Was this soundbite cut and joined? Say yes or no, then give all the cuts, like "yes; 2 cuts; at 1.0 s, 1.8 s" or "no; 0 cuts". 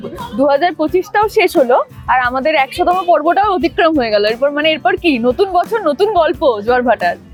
no; 0 cuts